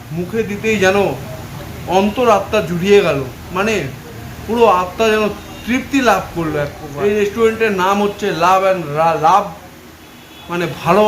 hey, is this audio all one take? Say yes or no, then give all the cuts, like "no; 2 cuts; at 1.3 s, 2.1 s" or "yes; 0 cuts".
no; 1 cut; at 6.8 s